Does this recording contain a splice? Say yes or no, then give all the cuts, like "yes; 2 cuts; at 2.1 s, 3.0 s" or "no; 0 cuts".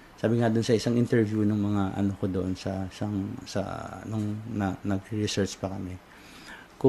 no; 0 cuts